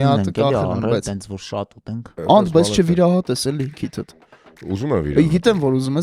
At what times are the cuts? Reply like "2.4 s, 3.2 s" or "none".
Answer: 2.1 s